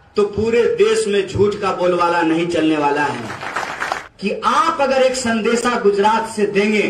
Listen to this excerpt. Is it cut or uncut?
cut